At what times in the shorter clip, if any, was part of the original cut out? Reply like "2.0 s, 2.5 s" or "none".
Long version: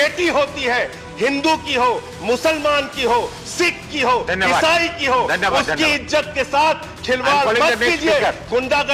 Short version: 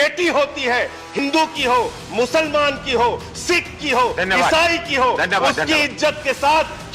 1.2 s